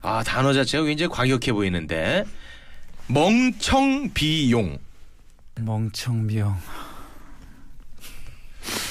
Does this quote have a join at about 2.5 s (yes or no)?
yes